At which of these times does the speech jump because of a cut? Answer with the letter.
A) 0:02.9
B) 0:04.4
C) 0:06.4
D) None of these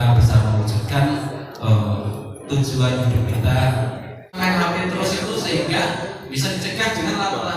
B